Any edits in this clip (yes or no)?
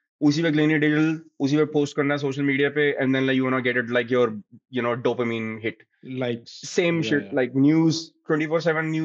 no